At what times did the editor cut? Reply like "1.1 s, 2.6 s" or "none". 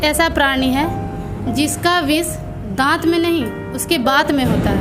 none